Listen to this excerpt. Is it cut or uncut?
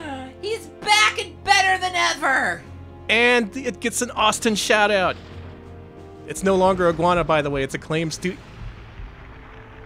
uncut